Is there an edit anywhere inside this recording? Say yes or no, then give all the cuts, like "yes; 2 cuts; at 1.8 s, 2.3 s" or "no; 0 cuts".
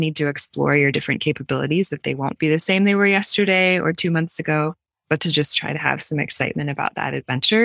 no; 0 cuts